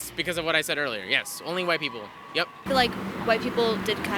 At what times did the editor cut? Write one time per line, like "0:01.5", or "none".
0:02.6